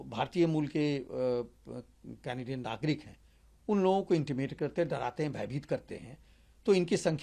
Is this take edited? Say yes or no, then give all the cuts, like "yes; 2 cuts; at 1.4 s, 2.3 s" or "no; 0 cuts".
no; 0 cuts